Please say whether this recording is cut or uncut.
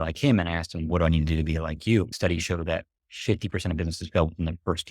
cut